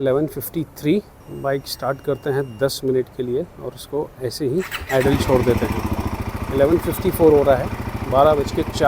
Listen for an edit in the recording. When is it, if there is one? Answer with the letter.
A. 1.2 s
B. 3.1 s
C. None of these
A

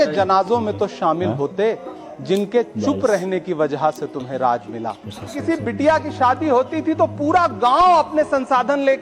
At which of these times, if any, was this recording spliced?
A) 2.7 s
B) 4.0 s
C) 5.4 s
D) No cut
C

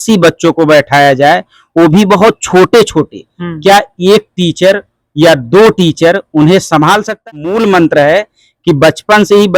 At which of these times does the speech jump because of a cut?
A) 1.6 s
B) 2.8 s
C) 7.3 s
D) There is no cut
C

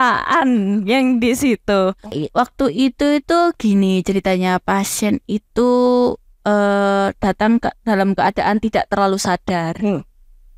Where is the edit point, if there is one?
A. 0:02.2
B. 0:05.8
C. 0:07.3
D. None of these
A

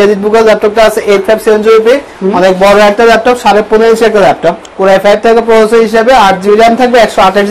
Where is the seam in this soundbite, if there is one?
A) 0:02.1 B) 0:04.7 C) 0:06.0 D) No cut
B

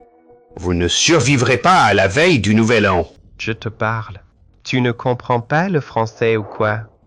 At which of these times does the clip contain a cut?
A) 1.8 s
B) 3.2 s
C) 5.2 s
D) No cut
B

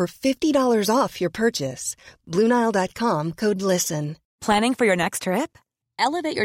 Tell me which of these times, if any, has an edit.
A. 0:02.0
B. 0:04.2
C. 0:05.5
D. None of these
B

